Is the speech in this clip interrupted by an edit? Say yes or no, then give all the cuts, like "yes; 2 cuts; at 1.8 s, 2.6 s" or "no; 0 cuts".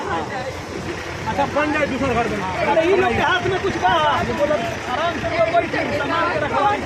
no; 0 cuts